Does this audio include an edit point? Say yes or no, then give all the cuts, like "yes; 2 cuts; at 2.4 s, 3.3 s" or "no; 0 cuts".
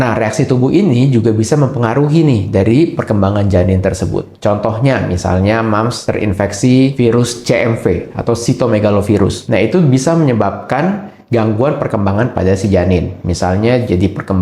yes; 1 cut; at 4.3 s